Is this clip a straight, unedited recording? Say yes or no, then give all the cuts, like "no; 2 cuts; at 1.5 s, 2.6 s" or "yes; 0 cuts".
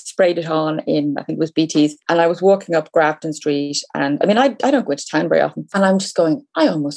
no; 2 cuts; at 2.0 s, 5.6 s